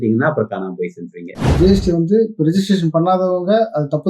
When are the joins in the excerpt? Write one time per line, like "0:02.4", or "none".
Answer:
0:01.5